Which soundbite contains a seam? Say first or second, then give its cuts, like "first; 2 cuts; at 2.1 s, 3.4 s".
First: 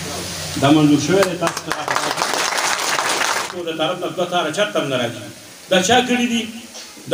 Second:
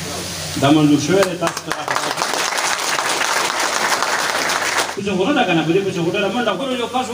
first; 1 cut; at 3.5 s